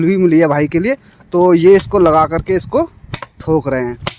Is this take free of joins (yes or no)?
yes